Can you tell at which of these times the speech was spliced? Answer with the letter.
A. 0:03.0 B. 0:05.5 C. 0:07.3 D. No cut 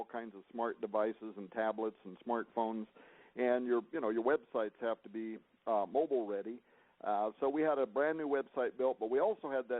B